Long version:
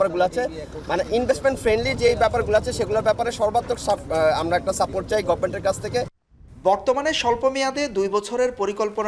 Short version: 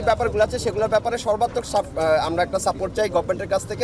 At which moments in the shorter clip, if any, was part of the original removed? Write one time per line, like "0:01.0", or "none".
none